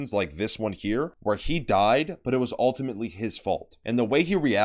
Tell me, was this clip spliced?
yes; 2 cuts; at 1.1 s, 3.7 s

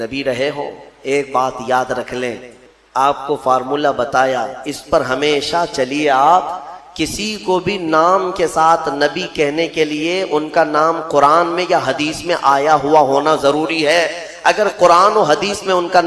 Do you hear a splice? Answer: yes; 1 cut; at 2.6 s

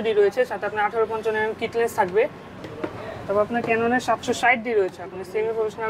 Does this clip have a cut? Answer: yes; 1 cut; at 2.5 s

